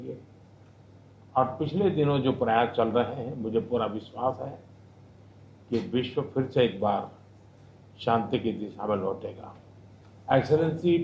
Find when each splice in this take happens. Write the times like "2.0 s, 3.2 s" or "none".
3.2 s